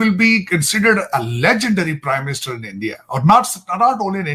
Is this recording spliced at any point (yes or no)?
no